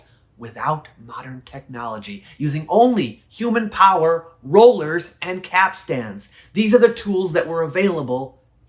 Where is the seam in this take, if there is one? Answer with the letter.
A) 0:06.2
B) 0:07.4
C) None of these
A